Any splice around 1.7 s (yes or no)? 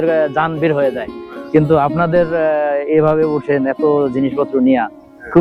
no